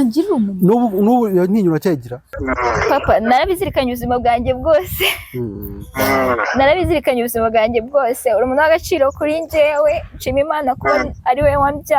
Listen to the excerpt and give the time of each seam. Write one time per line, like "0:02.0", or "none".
0:02.4